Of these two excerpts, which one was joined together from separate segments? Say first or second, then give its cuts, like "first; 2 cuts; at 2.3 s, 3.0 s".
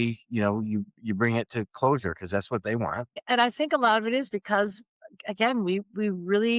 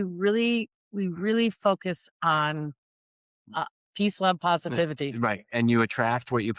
first; 1 cut; at 3.2 s